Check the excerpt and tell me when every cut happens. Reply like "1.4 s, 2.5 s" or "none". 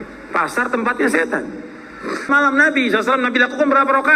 2.2 s